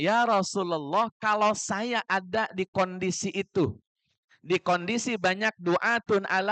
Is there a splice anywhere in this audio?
no; 0 cuts

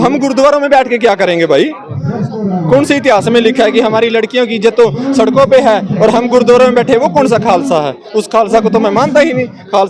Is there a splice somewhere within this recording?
no; 0 cuts

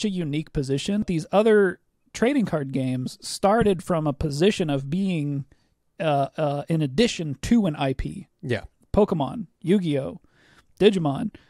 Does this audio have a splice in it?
yes; 1 cut; at 1.1 s

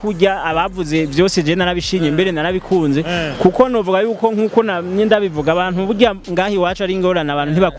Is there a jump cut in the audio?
no; 0 cuts

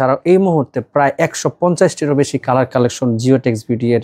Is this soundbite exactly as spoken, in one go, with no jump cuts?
yes; 0 cuts

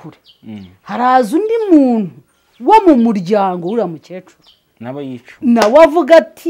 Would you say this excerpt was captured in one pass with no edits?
yes; 0 cuts

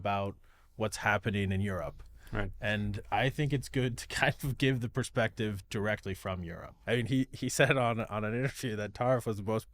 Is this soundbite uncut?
no; 1 cut; at 6.7 s

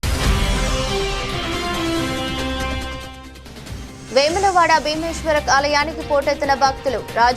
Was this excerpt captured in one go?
no; 2 cuts; at 2.6 s, 3.9 s

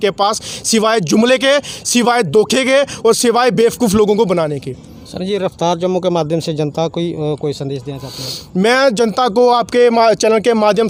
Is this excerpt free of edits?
yes; 0 cuts

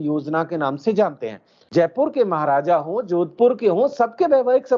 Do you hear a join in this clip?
yes; 1 cut; at 1.5 s

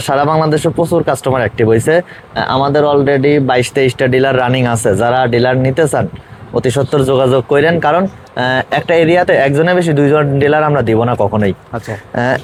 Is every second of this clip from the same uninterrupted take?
yes; 0 cuts

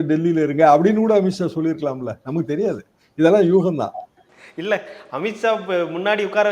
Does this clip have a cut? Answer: no; 0 cuts

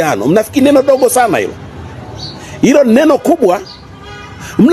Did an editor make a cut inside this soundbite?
no; 0 cuts

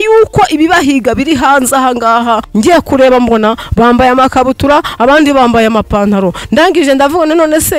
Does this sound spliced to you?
yes; 1 cut; at 2.5 s

